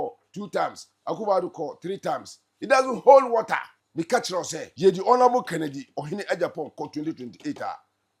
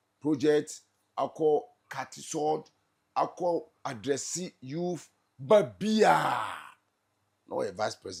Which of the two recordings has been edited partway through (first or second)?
first